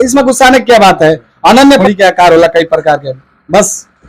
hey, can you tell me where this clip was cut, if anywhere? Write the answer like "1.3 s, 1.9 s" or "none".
1.8 s